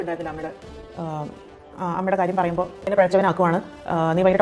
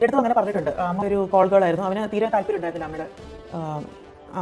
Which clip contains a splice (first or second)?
first